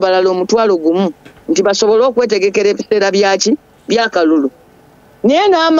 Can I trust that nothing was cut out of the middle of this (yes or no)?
yes